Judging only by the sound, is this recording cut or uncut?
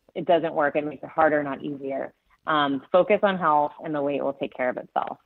uncut